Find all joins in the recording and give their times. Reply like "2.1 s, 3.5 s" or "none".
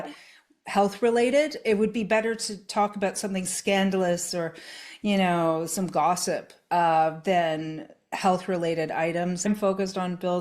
9.5 s